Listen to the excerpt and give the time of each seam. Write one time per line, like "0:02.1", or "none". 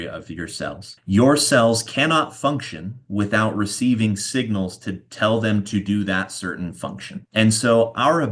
none